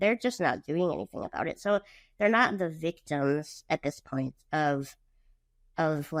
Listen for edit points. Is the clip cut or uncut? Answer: uncut